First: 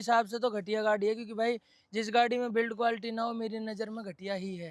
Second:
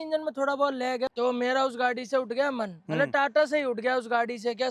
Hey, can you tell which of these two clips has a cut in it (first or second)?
second